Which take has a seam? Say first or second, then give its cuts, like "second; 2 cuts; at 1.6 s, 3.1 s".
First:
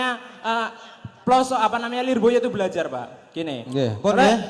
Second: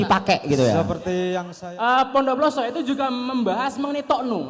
second; 1 cut; at 1.5 s